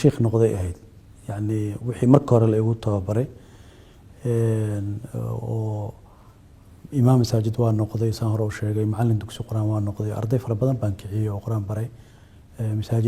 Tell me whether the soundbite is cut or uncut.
uncut